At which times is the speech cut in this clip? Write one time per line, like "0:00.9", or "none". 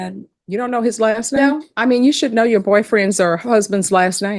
0:01.6